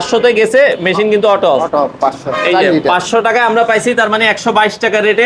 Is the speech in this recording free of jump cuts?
yes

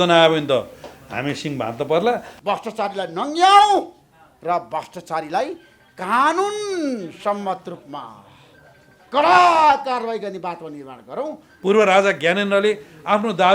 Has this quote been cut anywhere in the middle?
yes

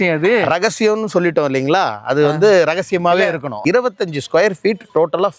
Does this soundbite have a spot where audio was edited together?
yes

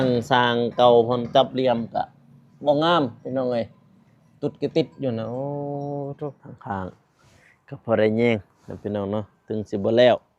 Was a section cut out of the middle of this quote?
yes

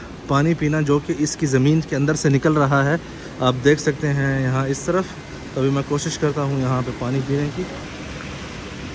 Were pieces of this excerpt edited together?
no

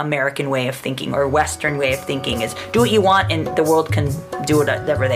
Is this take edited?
no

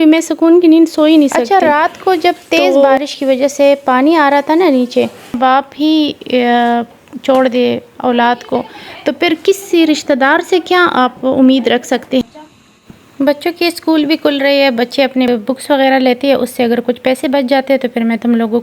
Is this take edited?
yes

